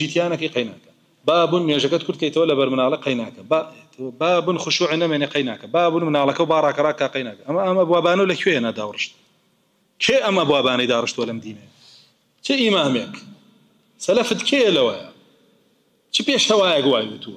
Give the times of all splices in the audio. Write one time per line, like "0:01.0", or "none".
none

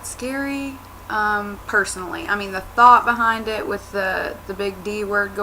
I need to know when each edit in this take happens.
0:02.6

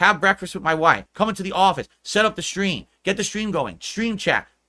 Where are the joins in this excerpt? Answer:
0:01.1

